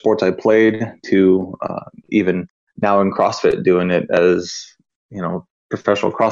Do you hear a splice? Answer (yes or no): yes